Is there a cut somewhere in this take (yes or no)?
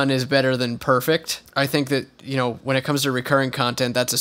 yes